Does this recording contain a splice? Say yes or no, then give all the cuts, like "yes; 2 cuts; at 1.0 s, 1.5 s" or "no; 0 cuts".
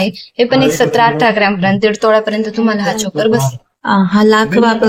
no; 0 cuts